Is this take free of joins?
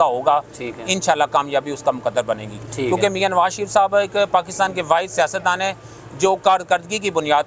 yes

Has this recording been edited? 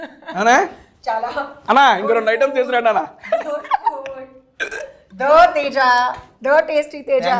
no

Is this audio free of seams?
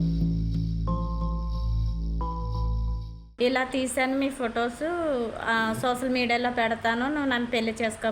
no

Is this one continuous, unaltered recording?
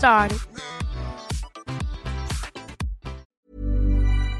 no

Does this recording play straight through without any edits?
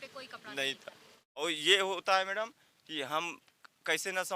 no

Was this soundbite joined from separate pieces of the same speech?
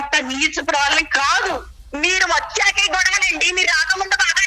yes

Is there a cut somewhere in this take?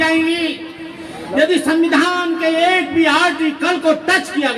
no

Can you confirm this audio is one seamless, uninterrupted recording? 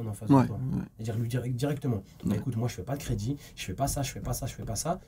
yes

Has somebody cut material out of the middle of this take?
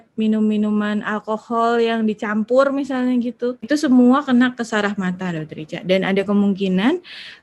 yes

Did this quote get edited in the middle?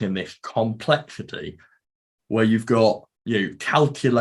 yes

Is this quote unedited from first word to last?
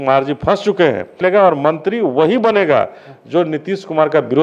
no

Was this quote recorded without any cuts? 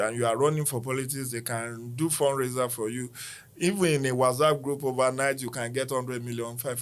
yes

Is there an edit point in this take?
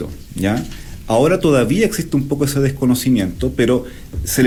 no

